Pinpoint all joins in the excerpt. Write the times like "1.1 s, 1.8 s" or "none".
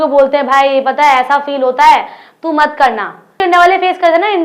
3.4 s